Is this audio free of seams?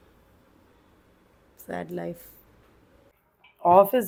yes; 0 cuts

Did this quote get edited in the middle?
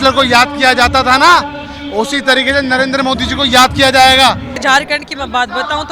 yes; 1 cut; at 4.6 s

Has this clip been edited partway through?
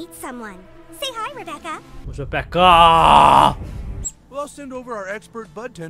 yes; 2 cuts; at 2.0 s, 4.1 s

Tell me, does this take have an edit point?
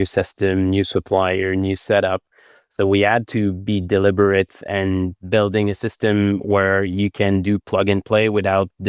no; 0 cuts

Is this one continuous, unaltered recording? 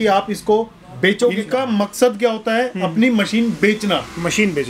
no; 1 cut; at 1.5 s

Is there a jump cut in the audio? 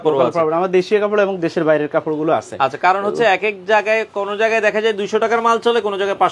no; 0 cuts

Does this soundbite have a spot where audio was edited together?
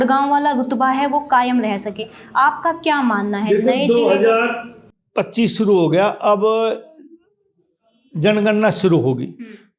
no; 0 cuts

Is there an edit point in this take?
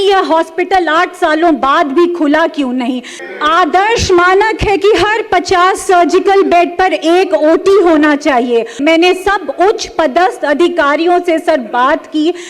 yes; 2 cuts; at 3.1 s, 8.8 s

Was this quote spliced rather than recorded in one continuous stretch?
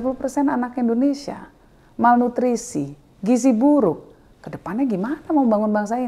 no; 0 cuts

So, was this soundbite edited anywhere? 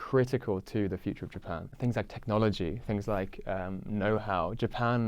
yes; 1 cut; at 1.7 s

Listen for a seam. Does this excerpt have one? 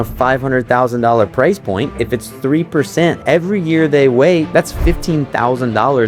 yes; 3 cuts; at 1.9 s, 3.2 s, 4.5 s

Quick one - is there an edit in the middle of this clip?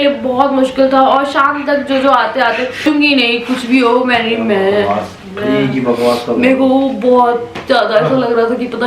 yes; 1 cut; at 2.8 s

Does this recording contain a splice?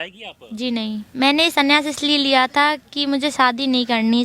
yes; 1 cut; at 1.0 s

